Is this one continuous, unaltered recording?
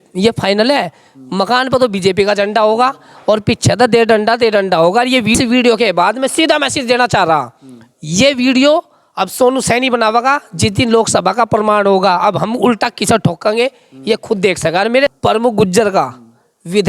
no; 2 cuts; at 5.3 s, 15.1 s

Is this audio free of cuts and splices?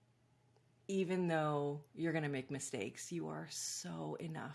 yes; 0 cuts

